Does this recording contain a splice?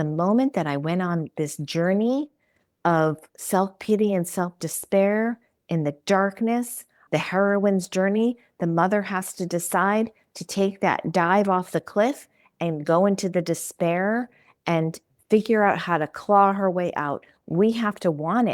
no; 0 cuts

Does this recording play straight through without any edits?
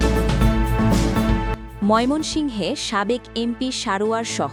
yes; 0 cuts

